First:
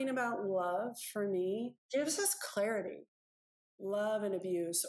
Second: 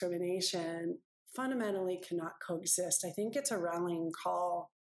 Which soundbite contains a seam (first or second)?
first